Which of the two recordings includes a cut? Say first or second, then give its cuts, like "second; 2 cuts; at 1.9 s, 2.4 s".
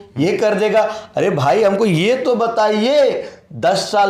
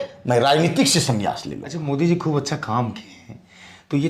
second; 1 cut; at 1.7 s